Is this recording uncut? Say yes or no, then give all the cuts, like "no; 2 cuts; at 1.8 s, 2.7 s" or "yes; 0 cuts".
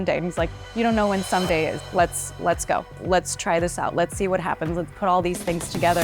no; 1 cut; at 1.8 s